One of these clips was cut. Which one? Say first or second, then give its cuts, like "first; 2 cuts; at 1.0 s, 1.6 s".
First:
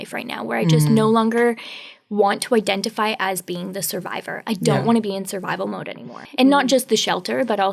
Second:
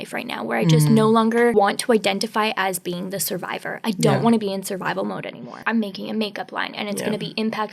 second; 2 cuts; at 1.5 s, 5.6 s